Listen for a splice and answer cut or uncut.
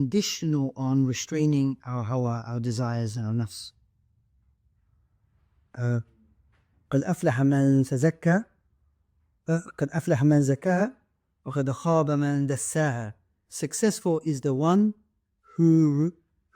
uncut